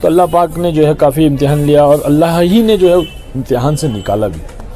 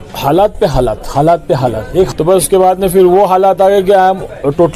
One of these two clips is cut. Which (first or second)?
second